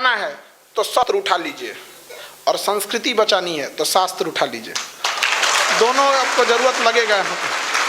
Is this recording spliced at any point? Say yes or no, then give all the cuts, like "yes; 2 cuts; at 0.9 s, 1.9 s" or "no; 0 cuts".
yes; 1 cut; at 1.1 s